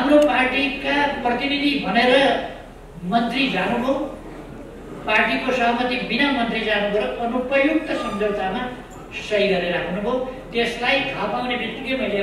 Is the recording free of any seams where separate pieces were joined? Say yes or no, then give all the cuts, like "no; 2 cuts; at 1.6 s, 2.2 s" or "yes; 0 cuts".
yes; 0 cuts